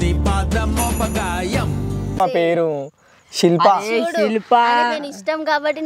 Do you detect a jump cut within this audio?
no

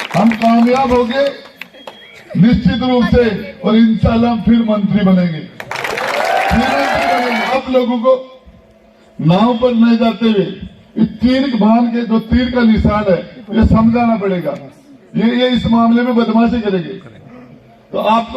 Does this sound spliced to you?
yes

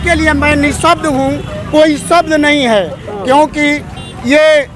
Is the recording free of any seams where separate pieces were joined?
yes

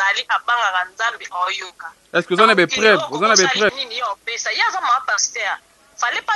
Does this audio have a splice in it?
yes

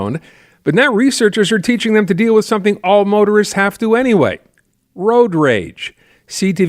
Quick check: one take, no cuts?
yes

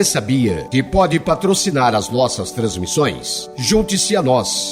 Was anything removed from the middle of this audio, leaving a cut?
no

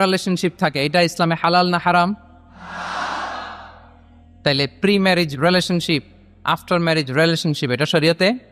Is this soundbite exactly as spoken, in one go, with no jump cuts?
yes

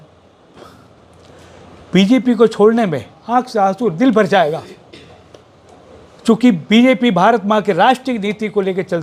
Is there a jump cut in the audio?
no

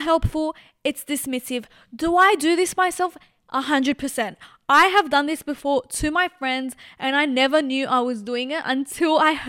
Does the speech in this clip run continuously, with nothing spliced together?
yes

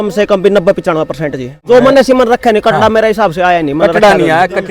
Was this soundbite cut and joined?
yes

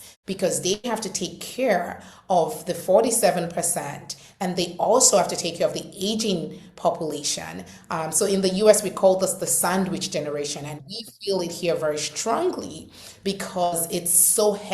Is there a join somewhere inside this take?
no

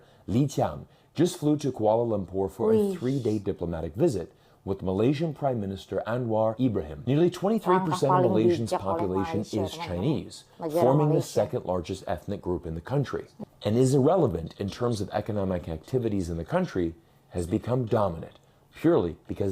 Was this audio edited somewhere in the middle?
yes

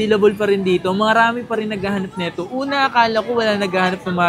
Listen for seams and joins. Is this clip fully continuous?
yes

